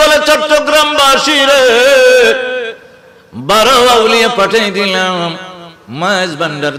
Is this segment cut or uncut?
uncut